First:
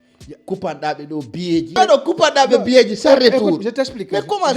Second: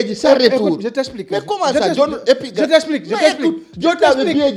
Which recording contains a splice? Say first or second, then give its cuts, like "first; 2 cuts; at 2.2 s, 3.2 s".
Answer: first; 1 cut; at 1.7 s